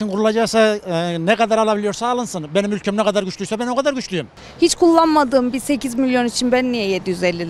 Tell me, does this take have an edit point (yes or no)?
yes